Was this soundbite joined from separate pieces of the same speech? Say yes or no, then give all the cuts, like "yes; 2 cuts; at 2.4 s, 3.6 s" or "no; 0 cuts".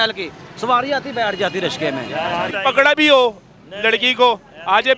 yes; 1 cut; at 2.5 s